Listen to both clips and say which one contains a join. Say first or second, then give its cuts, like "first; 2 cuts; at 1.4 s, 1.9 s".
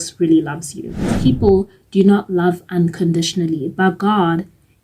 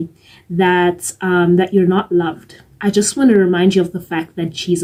first; 1 cut; at 1.1 s